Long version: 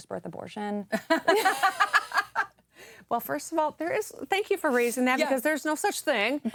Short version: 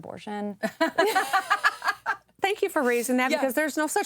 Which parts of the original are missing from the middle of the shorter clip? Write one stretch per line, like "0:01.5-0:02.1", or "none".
0:02.6-0:04.2